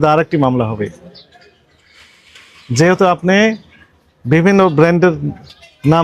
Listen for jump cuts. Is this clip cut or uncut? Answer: uncut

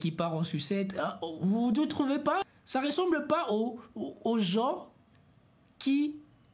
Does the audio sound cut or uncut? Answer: cut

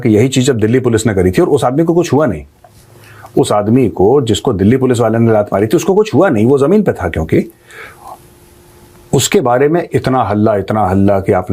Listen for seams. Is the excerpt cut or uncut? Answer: uncut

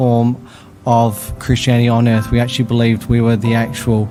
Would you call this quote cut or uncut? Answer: uncut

